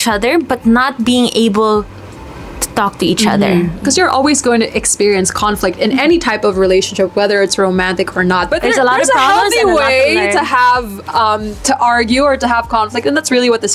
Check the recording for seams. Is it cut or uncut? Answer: cut